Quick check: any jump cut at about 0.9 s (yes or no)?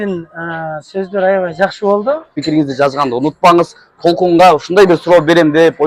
no